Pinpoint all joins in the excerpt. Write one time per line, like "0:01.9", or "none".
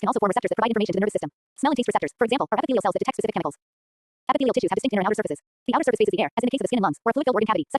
0:01.4